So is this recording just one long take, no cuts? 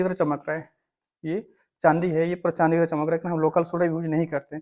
yes; 0 cuts

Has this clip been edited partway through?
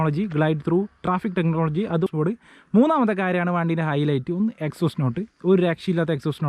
yes; 1 cut; at 2.1 s

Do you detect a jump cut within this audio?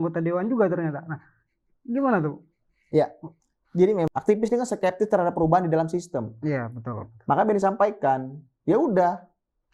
yes; 1 cut; at 4.1 s

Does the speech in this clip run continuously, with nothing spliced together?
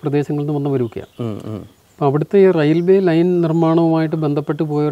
yes; 0 cuts

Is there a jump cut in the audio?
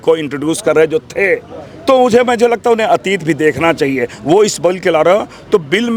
no; 0 cuts

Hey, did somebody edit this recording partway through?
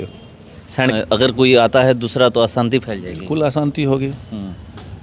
yes; 1 cut; at 0.9 s

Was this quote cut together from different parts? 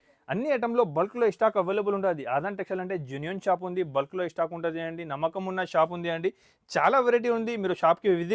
no; 0 cuts

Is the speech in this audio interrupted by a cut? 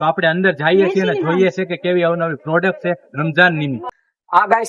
no; 0 cuts

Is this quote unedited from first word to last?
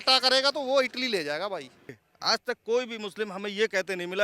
no; 1 cut; at 2.1 s

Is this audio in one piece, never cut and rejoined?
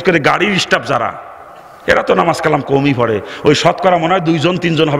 yes; 0 cuts

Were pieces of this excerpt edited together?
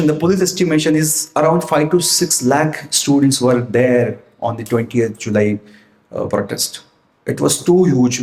no; 0 cuts

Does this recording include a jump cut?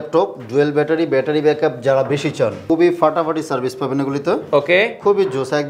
yes; 1 cut; at 2.6 s

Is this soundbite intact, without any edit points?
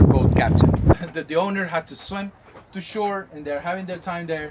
no; 1 cut; at 0.9 s

